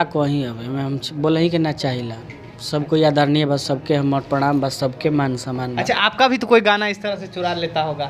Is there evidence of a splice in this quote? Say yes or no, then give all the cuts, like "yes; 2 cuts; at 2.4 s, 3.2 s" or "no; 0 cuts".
no; 0 cuts